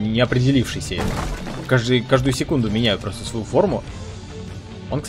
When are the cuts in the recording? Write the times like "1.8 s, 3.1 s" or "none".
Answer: none